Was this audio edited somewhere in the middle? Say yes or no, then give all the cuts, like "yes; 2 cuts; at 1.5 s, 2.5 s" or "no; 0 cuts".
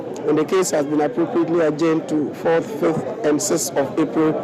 no; 0 cuts